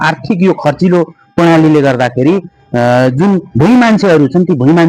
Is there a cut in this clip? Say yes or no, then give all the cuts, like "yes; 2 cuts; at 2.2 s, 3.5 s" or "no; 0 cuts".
no; 0 cuts